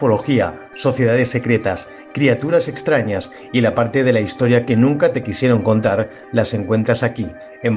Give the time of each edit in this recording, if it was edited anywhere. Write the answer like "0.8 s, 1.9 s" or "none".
none